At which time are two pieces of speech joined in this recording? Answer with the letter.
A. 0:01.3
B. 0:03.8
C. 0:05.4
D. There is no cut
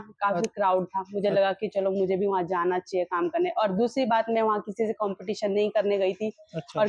D